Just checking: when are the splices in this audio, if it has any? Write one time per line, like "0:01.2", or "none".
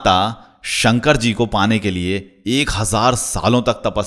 none

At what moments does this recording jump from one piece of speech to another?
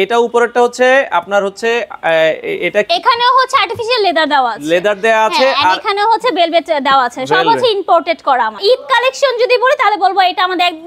0:08.6

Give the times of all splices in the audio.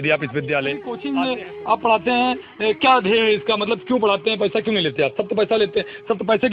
0:00.9

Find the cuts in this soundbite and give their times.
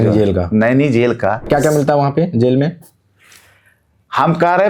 0:01.5

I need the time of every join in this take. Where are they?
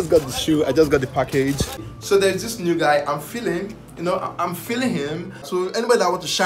0:01.9
0:05.5

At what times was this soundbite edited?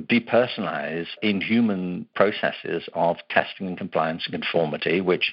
0:01.2
0:02.1

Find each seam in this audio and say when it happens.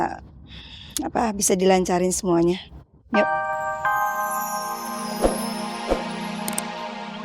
0:03.2

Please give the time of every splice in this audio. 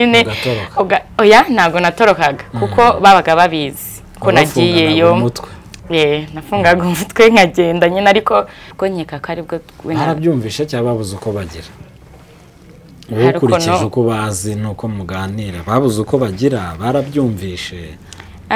0:08.6

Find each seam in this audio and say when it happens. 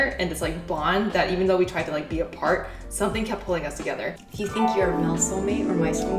0:04.2

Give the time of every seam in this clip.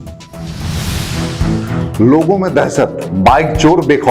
0:01.5

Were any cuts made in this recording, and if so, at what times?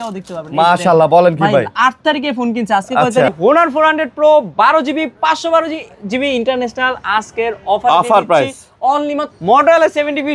0:03.3
0:09.2

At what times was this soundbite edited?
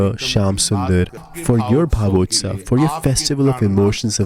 0:01.3

